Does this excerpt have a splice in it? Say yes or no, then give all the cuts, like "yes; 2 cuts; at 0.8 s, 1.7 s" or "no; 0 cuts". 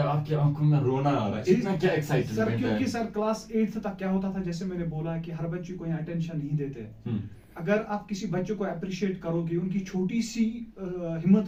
no; 0 cuts